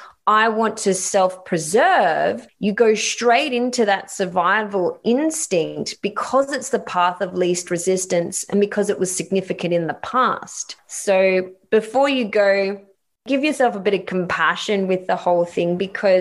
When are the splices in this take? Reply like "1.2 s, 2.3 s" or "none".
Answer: 13.2 s